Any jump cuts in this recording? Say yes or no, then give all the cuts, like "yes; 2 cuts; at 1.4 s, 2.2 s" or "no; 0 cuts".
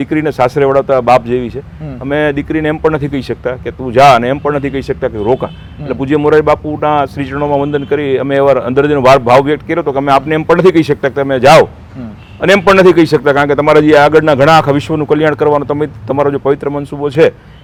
no; 0 cuts